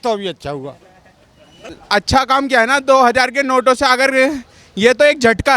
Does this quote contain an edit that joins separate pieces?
yes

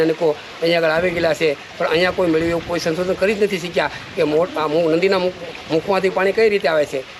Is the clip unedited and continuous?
yes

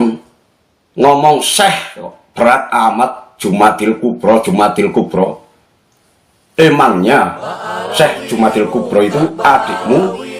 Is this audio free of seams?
yes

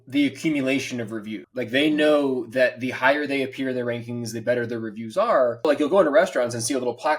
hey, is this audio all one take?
no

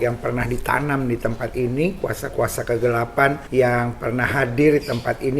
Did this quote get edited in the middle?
yes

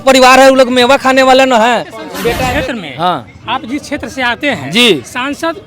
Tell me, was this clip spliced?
yes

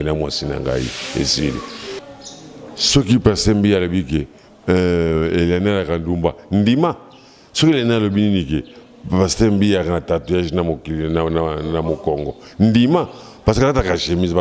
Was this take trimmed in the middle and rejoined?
yes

